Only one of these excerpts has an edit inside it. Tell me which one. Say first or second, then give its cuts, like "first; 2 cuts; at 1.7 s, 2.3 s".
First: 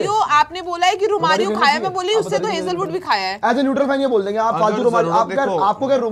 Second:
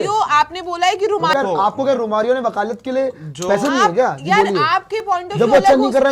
second; 1 cut; at 1.3 s